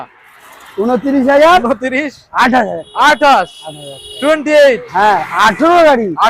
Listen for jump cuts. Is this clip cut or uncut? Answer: uncut